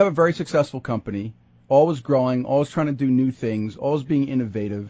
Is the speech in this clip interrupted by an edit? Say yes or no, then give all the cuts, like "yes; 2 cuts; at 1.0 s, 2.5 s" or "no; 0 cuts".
no; 0 cuts